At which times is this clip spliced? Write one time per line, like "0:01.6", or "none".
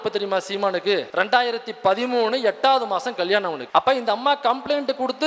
0:01.1
0:03.6